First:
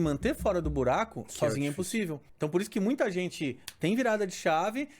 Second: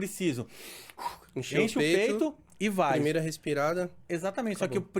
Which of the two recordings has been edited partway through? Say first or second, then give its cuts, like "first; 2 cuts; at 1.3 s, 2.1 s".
first; 1 cut; at 2.2 s